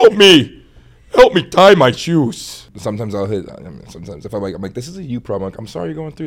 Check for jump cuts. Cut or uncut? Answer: cut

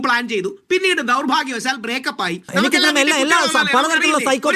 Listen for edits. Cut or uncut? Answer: cut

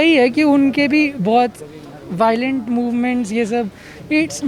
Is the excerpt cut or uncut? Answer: uncut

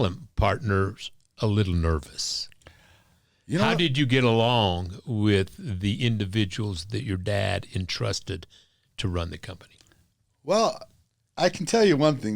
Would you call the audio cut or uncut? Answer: cut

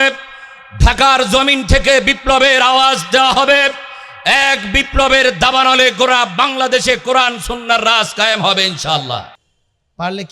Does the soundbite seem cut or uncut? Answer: cut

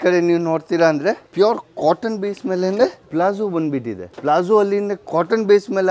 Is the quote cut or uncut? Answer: cut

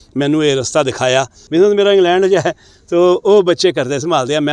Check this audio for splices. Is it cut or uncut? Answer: cut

